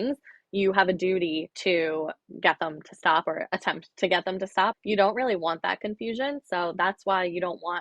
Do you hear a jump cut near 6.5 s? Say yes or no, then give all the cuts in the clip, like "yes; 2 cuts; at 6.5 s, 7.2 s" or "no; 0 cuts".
no; 3 cuts; at 1.5 s, 2.2 s, 4.8 s